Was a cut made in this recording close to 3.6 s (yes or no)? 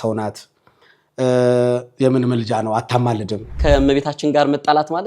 yes